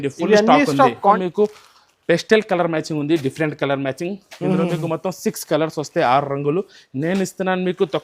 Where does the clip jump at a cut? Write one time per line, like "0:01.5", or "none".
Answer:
0:01.2